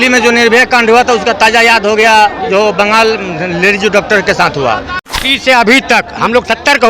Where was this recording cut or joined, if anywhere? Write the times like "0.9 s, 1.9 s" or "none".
5.1 s

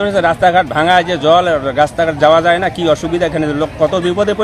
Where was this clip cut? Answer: none

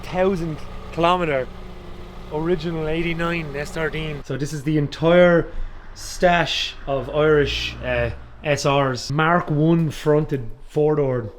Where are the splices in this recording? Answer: 4.2 s, 9.0 s

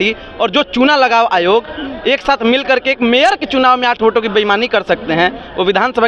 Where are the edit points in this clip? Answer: none

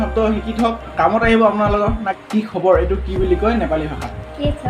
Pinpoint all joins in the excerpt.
0.8 s, 2.1 s

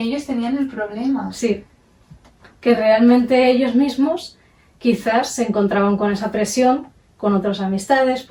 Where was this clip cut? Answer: none

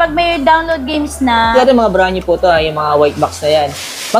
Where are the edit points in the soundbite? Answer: 1.5 s

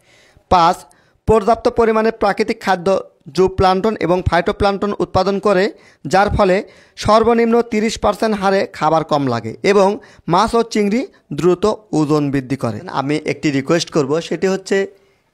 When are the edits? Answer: 12.8 s

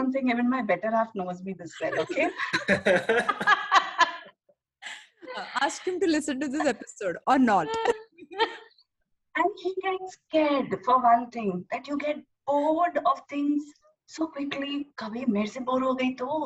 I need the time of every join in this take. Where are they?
none

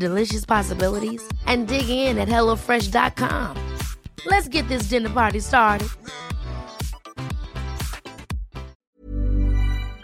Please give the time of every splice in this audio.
8.8 s

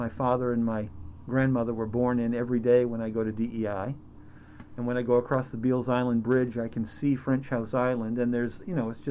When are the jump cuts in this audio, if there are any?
none

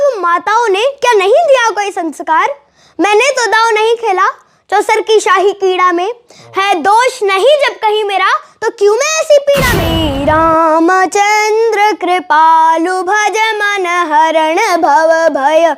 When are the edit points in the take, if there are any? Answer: 10.0 s

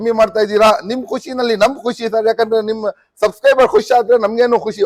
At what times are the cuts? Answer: none

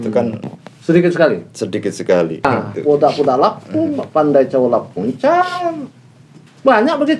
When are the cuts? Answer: 2.4 s

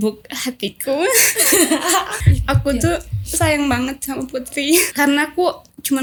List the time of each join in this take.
none

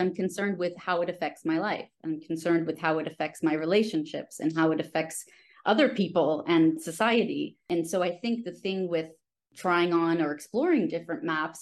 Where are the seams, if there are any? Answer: 7.7 s, 9.5 s

